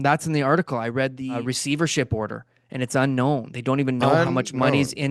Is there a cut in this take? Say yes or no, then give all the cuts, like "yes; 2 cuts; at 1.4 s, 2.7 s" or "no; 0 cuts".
yes; 1 cut; at 1.4 s